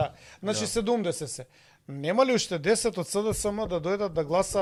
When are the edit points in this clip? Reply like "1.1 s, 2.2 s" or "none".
none